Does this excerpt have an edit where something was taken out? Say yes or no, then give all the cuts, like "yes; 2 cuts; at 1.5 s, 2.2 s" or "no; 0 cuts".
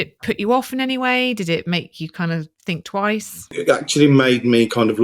yes; 1 cut; at 3.6 s